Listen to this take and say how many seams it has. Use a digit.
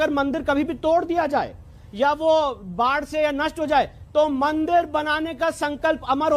0